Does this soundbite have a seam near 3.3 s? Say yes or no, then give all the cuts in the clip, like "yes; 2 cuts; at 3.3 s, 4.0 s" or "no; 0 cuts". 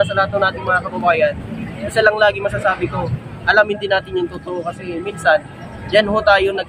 no; 0 cuts